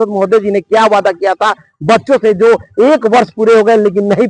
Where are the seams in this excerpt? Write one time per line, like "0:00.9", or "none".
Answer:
none